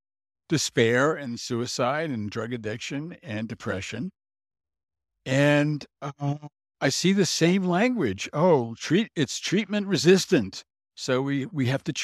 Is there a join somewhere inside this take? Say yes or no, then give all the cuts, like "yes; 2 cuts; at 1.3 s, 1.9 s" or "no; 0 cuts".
no; 0 cuts